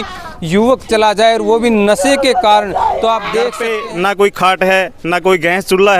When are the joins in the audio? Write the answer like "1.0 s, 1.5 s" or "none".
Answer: 3.6 s